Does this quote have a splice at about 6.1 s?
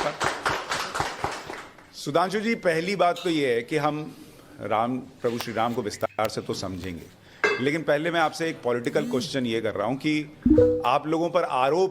no; 1 cut; at 8.6 s

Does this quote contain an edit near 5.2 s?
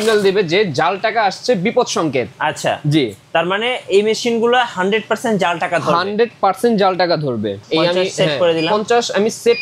no; 1 cut; at 7.6 s

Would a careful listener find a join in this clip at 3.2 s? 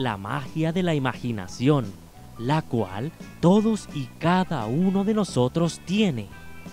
no; 1 cut; at 1.9 s

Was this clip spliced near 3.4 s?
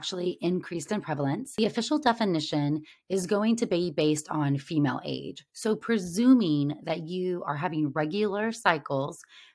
no; 1 cut; at 1.5 s

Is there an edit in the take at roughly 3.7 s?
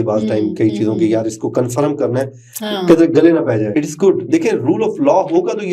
yes; 1 cut; at 3.7 s

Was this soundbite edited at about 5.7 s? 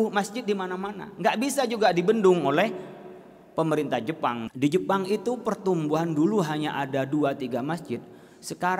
no; 1 cut; at 4.4 s

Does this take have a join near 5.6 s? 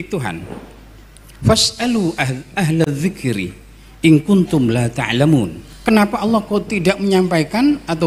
yes; 1 cut; at 5.6 s

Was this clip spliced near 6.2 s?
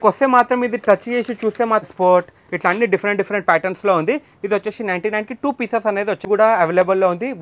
yes; 2 cuts; at 1.9 s, 6.2 s

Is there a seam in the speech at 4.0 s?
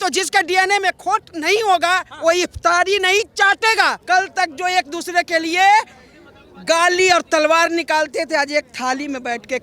yes; 1 cut; at 4.0 s

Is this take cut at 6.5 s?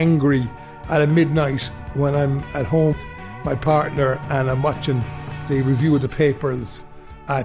no; 1 cut; at 3.0 s

